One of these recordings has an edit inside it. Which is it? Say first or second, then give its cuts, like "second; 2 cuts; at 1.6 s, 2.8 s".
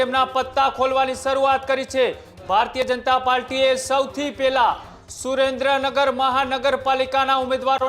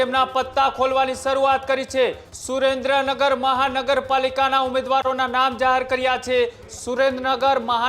second; 2 cuts; at 2.3 s, 6.6 s